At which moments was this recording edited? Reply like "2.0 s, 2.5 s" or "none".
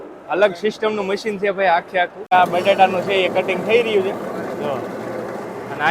2.2 s